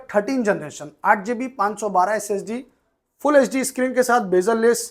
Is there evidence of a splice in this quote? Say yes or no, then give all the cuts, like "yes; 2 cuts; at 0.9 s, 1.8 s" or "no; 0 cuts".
no; 0 cuts